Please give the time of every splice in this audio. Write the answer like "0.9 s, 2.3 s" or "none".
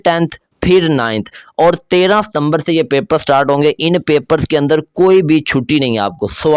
none

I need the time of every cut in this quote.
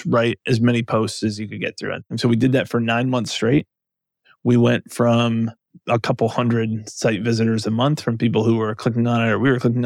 2.1 s, 5.7 s

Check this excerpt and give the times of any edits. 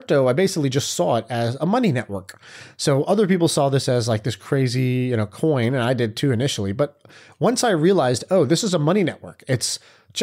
none

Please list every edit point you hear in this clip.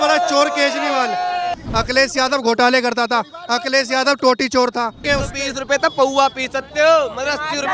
1.5 s, 5.0 s

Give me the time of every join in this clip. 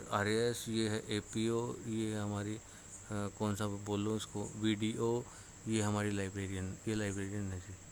none

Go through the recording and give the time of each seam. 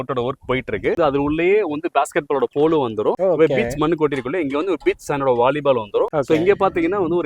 1.0 s

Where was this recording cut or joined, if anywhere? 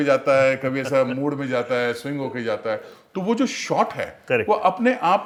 none

